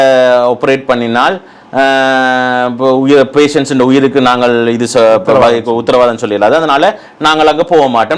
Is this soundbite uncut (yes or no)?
yes